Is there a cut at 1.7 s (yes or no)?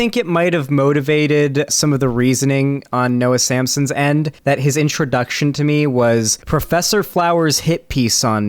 yes